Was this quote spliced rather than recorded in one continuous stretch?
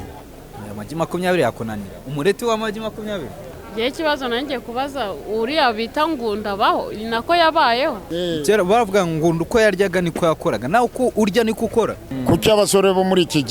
yes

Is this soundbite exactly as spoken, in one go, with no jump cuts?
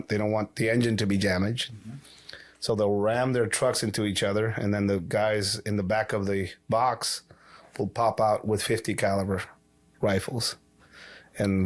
yes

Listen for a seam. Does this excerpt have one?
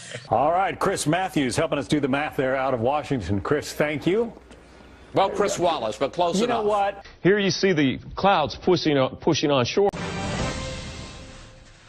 no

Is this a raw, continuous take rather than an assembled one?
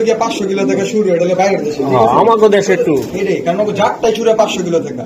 yes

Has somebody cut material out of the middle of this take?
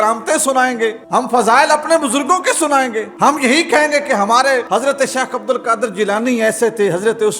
yes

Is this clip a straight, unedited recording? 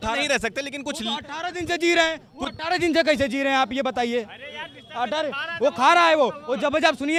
yes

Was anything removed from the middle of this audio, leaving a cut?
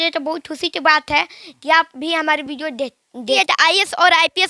yes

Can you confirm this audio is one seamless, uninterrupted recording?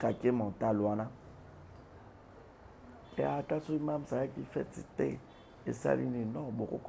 yes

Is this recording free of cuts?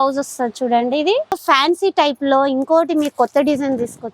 no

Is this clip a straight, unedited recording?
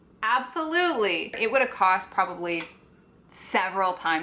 no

